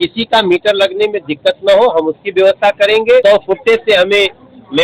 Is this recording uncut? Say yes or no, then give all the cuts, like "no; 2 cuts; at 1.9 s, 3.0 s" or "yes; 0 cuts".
no; 1 cut; at 3.2 s